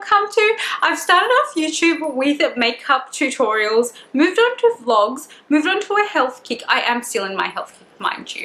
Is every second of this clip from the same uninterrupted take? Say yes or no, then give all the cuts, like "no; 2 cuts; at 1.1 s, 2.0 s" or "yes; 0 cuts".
yes; 0 cuts